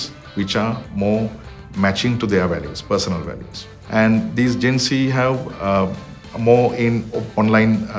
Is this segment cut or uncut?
uncut